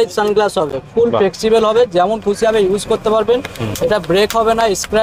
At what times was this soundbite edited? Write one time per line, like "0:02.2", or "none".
none